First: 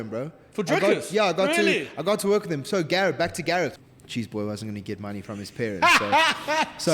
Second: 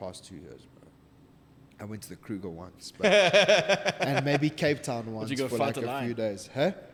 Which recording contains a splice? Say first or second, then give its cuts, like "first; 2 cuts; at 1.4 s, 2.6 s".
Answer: first; 1 cut; at 3.8 s